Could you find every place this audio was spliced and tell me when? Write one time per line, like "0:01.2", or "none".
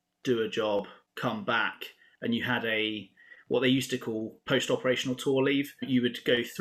0:01.0
0:04.4
0:05.8